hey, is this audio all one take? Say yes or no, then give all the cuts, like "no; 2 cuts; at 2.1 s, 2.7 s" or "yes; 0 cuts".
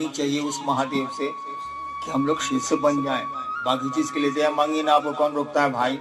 yes; 0 cuts